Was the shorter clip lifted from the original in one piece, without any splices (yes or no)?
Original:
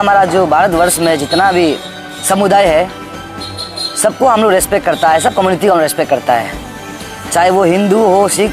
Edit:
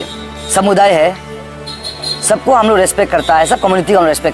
yes